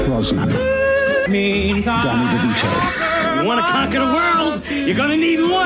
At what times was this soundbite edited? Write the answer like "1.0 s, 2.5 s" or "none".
none